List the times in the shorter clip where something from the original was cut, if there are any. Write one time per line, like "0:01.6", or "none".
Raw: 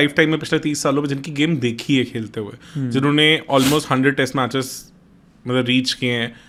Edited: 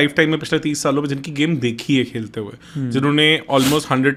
none